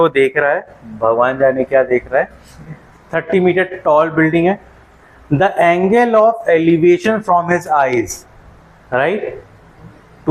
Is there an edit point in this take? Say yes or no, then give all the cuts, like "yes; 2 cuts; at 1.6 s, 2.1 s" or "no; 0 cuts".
no; 0 cuts